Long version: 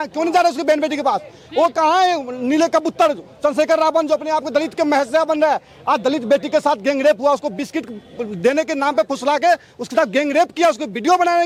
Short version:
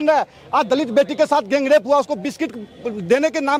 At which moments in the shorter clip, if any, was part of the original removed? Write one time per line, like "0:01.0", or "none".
none